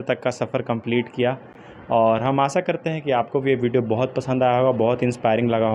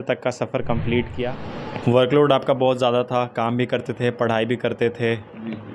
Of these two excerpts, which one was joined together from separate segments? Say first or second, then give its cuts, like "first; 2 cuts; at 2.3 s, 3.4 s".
second; 1 cut; at 1.4 s